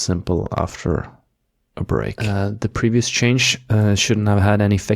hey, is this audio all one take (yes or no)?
no